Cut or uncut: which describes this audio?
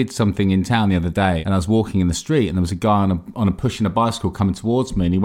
cut